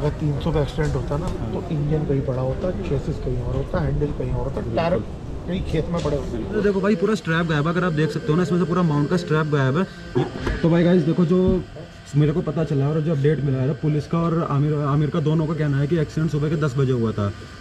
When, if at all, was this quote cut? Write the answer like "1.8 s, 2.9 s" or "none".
6.6 s, 10.0 s